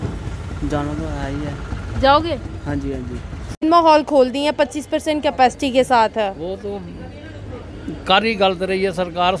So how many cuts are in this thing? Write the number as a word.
one